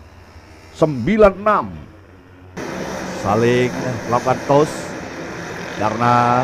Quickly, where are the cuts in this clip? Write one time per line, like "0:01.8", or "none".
0:02.6